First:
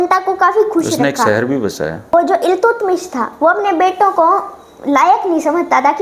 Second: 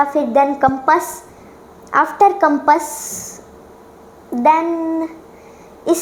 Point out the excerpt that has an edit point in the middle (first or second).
first